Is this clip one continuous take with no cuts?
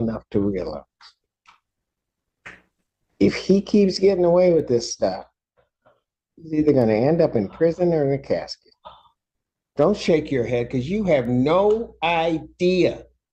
yes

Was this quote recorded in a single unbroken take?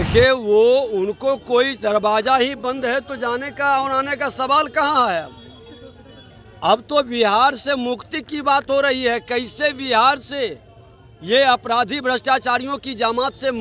yes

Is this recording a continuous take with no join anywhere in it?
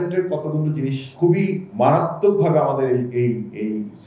no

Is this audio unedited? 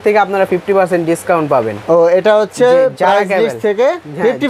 yes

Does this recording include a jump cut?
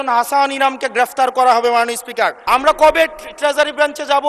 yes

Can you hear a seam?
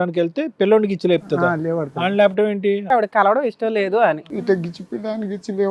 yes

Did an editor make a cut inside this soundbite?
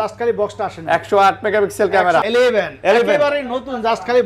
yes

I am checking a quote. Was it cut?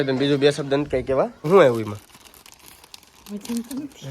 yes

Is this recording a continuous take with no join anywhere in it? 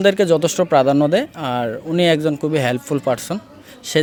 yes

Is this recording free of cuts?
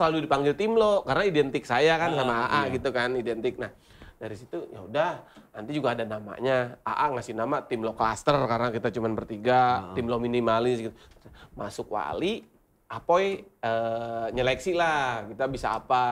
yes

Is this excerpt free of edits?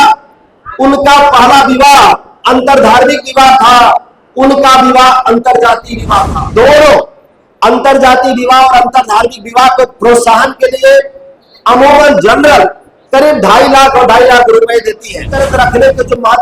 no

